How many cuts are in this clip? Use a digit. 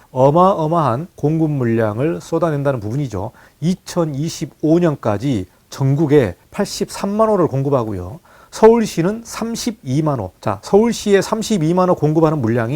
3